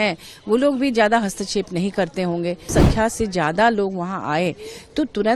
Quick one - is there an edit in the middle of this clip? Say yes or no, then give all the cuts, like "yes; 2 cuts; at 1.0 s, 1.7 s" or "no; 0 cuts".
yes; 1 cut; at 2.7 s